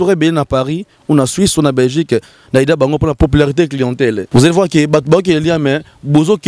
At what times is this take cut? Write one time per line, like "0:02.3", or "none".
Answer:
0:03.1
0:04.2